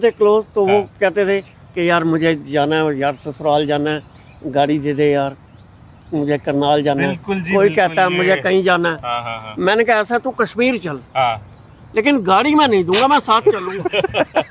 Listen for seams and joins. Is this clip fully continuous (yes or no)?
yes